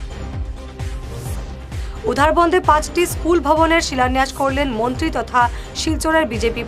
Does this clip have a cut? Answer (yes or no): no